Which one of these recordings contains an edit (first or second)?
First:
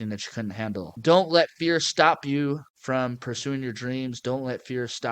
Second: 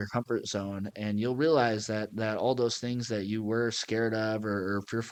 first